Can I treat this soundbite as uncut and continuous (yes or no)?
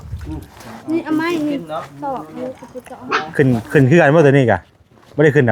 no